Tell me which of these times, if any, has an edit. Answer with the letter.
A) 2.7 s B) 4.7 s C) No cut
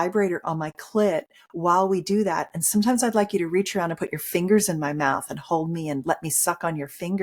C